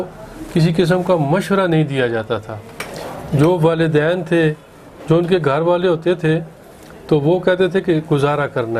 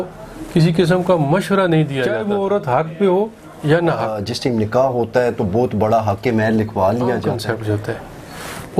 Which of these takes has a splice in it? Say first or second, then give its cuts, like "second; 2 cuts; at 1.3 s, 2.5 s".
second; 3 cuts; at 2.2 s, 4.3 s, 7.3 s